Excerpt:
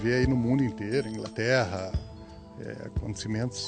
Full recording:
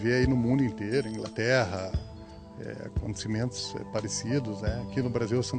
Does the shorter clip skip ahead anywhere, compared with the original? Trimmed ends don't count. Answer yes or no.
no